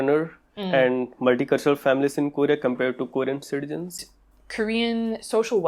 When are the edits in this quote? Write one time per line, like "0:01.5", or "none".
0:04.0